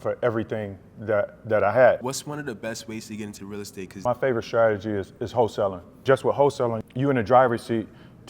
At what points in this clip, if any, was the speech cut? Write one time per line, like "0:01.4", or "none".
0:02.0
0:04.0
0:06.0
0:06.8